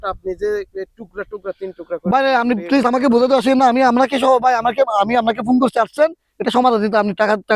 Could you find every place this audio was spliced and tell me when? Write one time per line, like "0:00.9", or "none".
none

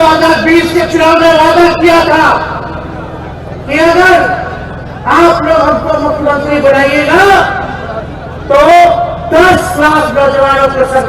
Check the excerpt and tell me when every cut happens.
none

